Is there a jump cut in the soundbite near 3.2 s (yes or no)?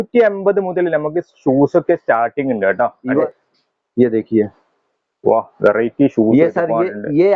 yes